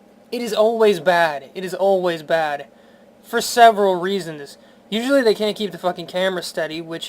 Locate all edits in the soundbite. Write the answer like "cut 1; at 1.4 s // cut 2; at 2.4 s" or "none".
cut 1; at 1.0 s